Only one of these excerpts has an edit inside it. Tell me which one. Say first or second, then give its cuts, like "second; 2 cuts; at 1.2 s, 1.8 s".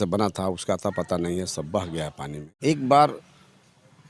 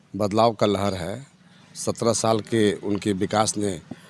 first; 1 cut; at 2.4 s